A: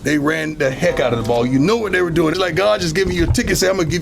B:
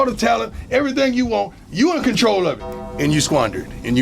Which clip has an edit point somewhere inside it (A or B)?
A